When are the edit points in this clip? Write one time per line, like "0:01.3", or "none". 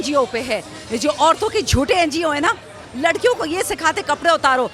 none